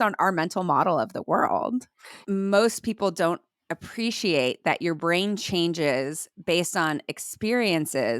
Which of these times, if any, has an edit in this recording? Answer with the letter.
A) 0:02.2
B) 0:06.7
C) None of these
A